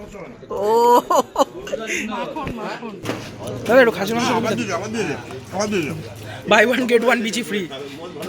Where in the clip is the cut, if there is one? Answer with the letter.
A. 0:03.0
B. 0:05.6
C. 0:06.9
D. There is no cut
A